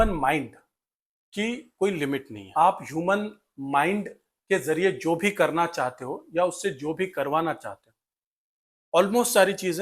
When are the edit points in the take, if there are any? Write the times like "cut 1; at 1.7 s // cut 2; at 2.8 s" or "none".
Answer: cut 1; at 2.4 s